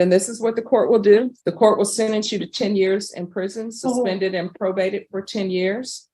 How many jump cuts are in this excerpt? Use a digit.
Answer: 1